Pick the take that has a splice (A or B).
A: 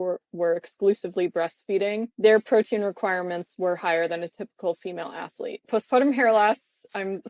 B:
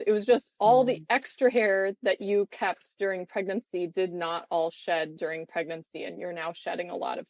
A